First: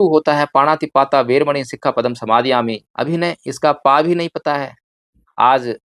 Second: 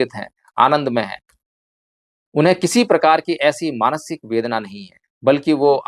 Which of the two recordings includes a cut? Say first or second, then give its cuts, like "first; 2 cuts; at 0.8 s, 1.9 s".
first; 1 cut; at 2.9 s